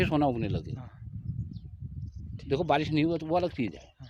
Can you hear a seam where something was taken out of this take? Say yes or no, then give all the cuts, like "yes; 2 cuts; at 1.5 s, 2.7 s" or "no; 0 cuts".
no; 0 cuts